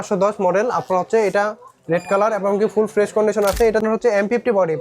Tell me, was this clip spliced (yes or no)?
yes